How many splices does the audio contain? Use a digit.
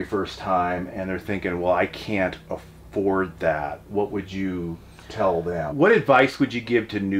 1